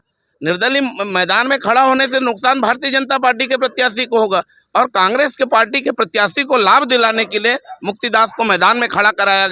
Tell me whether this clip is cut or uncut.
cut